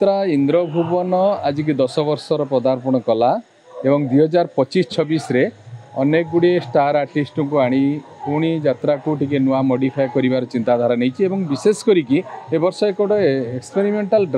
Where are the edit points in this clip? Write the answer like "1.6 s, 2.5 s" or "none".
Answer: none